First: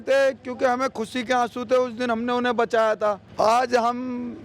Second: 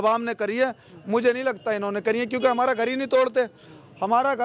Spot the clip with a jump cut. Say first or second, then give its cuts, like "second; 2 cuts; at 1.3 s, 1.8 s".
first; 1 cut; at 3.2 s